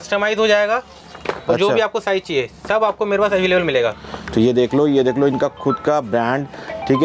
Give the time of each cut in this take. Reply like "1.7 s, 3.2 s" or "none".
none

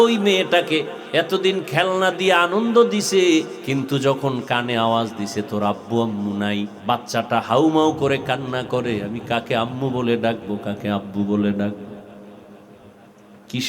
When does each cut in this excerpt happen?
1.0 s, 3.6 s, 6.8 s

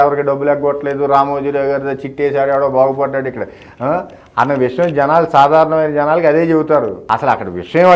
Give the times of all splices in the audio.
7.0 s

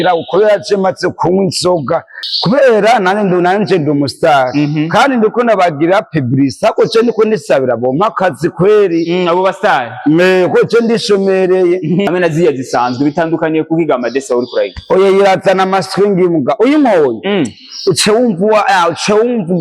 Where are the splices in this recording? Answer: 2.2 s, 12.1 s

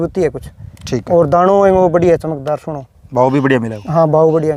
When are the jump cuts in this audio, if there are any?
none

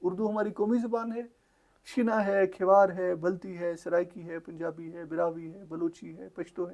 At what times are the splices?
none

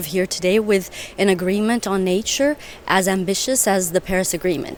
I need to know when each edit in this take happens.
none

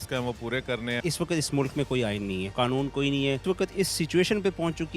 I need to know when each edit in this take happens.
1.0 s, 2.5 s, 3.4 s

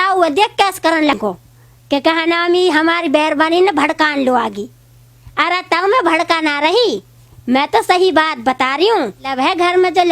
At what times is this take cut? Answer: 1.1 s, 9.3 s

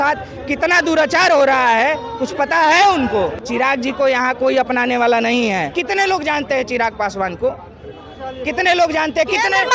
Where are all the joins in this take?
3.4 s, 5.7 s

